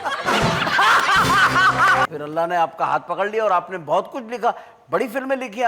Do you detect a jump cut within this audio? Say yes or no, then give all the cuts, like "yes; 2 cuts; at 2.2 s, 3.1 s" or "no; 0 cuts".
yes; 1 cut; at 2.1 s